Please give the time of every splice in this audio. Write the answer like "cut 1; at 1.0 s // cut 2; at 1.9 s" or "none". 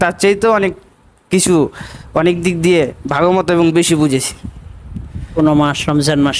cut 1; at 5.4 s